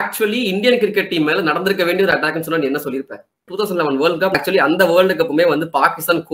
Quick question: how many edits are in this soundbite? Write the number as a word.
two